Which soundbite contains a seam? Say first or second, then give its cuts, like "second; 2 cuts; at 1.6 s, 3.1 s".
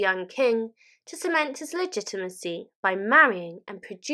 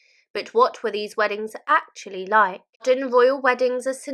second; 1 cut; at 2.8 s